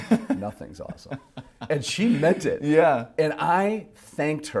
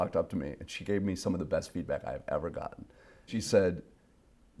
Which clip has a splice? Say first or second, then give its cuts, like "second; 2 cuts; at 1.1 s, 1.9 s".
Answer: second; 1 cut; at 3.3 s